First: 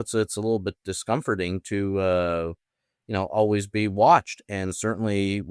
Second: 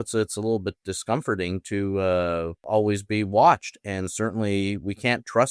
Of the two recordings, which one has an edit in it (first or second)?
second